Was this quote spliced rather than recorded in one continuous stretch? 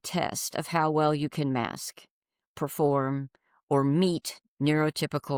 no; 0 cuts

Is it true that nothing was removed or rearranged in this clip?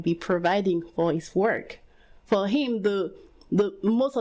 yes; 0 cuts

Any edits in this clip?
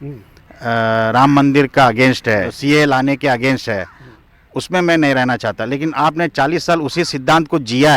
yes; 1 cut; at 2.5 s

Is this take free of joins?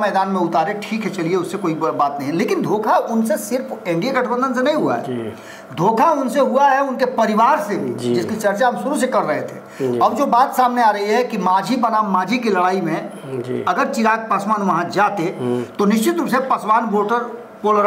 yes; 0 cuts

